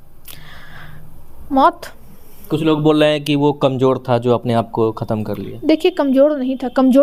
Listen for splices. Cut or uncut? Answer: uncut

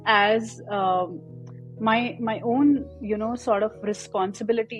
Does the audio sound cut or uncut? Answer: uncut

